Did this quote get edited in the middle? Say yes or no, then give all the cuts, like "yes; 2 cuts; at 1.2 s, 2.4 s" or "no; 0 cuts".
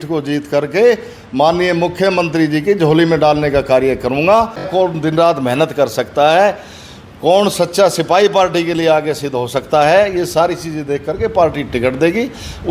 yes; 1 cut; at 4.7 s